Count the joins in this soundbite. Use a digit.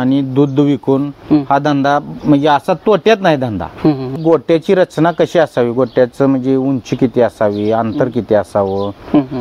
1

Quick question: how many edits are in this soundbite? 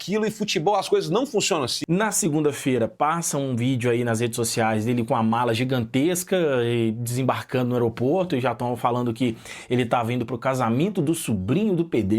1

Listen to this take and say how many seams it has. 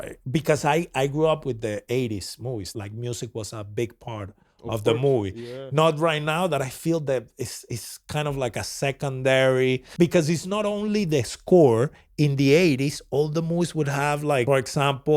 3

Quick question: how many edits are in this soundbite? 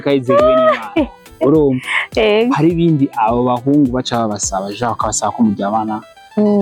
0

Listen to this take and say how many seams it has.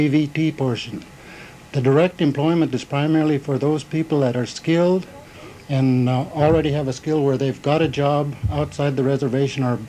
1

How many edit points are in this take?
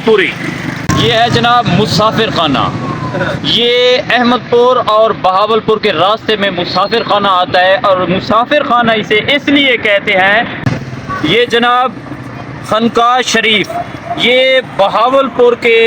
2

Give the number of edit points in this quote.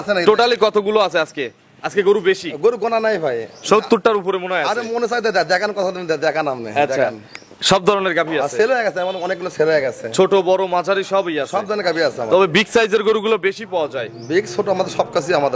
0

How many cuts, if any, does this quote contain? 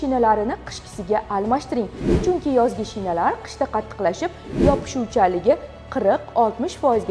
0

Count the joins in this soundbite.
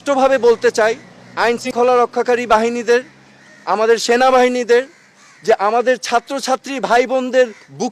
1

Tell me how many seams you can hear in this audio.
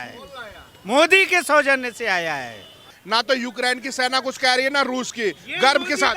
1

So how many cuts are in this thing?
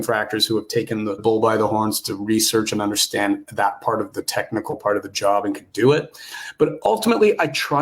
1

